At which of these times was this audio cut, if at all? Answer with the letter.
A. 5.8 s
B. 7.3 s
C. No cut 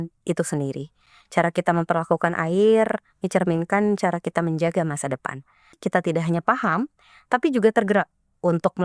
A